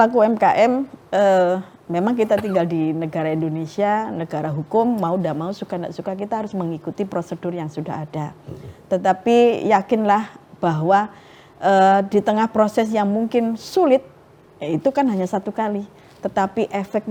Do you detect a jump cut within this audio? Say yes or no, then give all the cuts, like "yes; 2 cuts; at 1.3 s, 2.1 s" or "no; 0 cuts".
no; 0 cuts